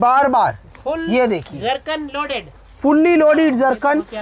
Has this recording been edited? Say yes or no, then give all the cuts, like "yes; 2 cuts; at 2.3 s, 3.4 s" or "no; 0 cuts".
no; 0 cuts